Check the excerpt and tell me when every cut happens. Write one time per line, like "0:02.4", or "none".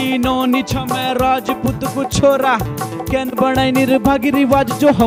none